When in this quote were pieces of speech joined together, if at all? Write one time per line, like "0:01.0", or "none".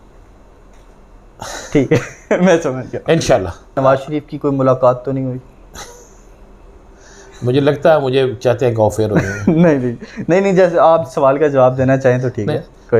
0:03.8